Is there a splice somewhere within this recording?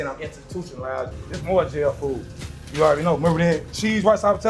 yes; 1 cut; at 1.1 s

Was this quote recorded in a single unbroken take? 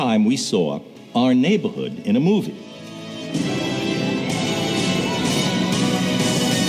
no; 1 cut; at 1.1 s

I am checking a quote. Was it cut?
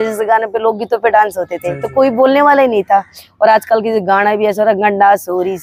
no; 0 cuts

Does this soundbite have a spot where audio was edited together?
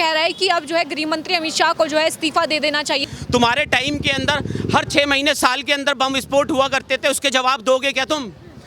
yes; 1 cut; at 3.0 s

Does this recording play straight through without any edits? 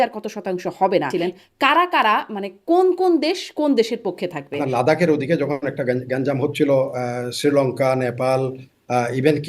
no; 2 cuts; at 1.1 s, 4.5 s

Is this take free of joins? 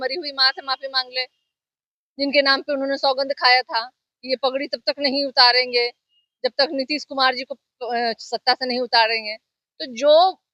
yes; 0 cuts

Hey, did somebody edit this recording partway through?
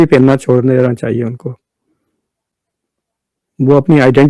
no; 0 cuts

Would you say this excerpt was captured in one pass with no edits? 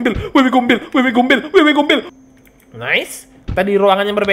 no; 1 cut; at 2.1 s

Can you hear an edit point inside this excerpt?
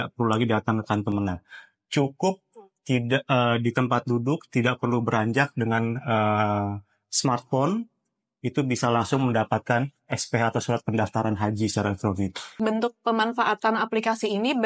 yes; 1 cut; at 12.5 s

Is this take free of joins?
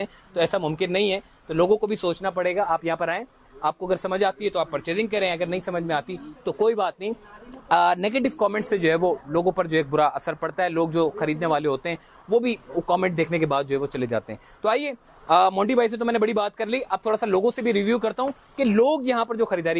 yes; 0 cuts

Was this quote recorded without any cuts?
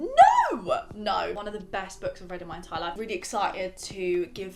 no; 2 cuts; at 1.3 s, 3.0 s

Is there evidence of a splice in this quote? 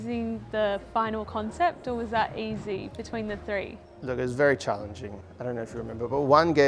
no; 0 cuts

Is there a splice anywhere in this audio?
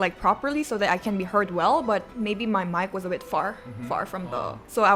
no; 0 cuts

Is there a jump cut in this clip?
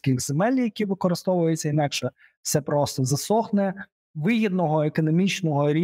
no; 0 cuts

